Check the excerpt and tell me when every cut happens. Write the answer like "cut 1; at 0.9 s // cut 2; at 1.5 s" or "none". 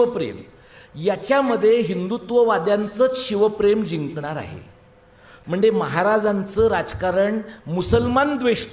cut 1; at 5.4 s